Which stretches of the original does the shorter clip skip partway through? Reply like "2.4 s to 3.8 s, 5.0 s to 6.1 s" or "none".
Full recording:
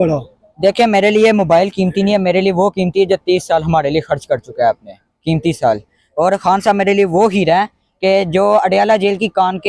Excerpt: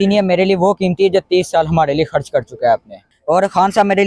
5.0 s to 6.0 s